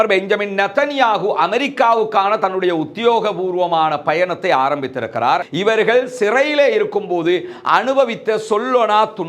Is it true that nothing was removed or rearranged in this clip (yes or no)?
no